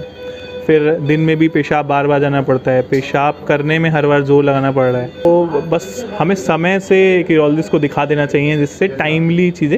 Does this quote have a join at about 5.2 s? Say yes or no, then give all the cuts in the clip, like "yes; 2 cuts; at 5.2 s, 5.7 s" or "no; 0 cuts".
yes; 1 cut; at 5.2 s